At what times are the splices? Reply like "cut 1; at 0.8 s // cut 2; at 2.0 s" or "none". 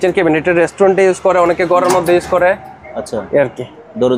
none